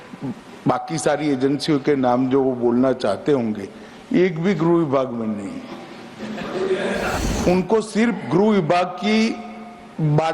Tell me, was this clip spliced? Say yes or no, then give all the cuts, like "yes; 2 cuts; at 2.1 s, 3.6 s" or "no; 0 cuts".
yes; 1 cut; at 7.2 s